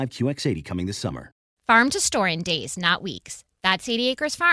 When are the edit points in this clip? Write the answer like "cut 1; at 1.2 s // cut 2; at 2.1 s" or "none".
cut 1; at 1.5 s